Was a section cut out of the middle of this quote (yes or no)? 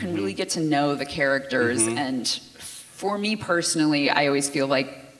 no